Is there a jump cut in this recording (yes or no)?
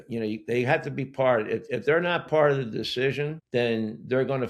yes